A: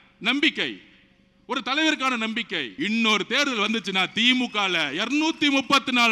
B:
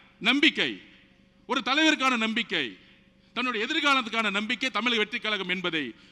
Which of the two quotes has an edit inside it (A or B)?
A